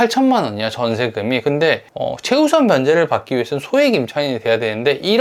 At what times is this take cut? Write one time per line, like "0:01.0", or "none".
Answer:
none